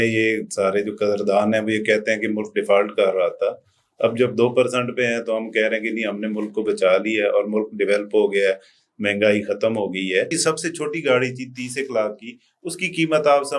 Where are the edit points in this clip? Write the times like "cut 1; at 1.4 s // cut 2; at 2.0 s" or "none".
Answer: cut 1; at 10.3 s